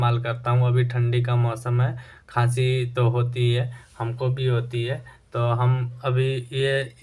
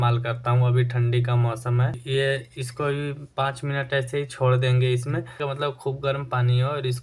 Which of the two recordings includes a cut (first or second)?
second